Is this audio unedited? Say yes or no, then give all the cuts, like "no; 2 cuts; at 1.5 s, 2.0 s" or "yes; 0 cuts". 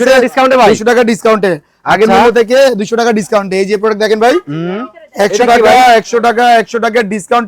yes; 0 cuts